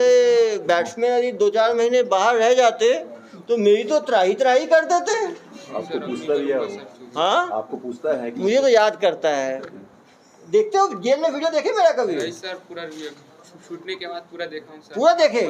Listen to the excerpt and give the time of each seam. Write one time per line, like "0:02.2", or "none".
none

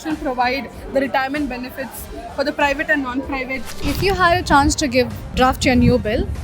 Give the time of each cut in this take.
0:03.7
0:05.3

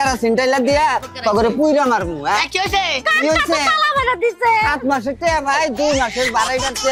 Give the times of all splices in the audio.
none

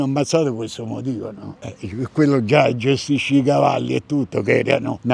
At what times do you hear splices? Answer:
none

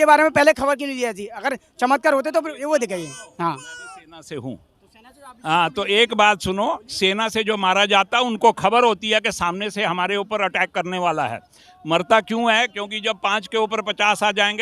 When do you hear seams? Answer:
none

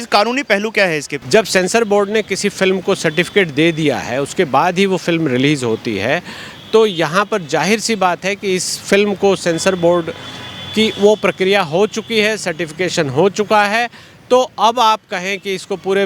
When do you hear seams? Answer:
0:01.1

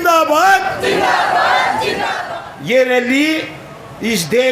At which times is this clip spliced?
0:02.2

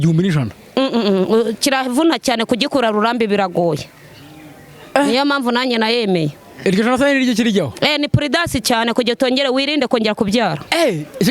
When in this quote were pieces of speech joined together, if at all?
none

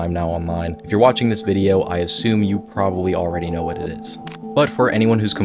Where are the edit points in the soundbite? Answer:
0:03.6

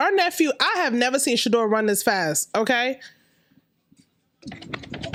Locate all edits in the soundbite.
none

